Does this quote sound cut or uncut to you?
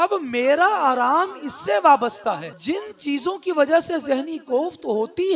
cut